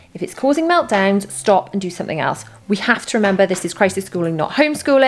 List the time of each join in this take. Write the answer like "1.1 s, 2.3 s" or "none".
none